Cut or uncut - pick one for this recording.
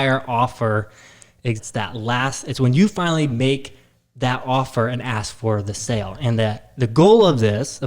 cut